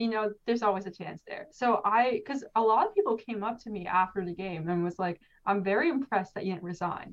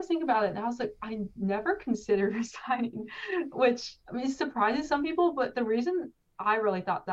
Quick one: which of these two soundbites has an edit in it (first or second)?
first